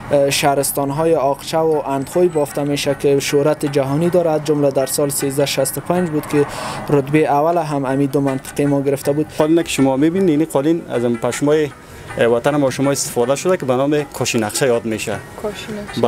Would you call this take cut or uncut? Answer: cut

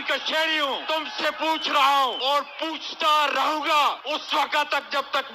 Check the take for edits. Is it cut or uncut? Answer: cut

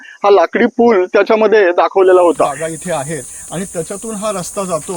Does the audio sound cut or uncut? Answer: cut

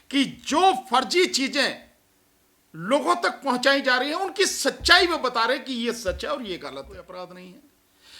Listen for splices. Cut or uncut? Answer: cut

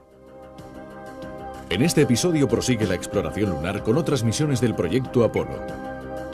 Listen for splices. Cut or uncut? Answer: uncut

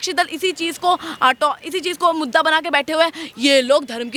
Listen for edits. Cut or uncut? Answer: uncut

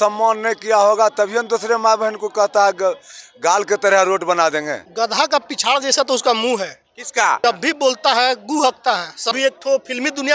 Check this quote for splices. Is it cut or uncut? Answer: cut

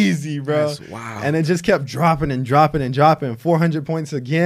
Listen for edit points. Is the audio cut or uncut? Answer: uncut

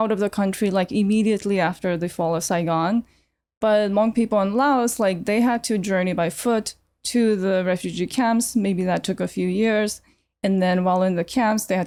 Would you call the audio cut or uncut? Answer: uncut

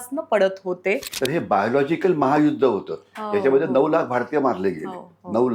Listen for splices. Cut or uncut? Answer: cut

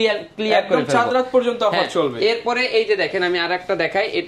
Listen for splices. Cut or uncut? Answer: uncut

